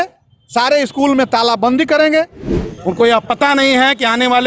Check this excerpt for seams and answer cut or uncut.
cut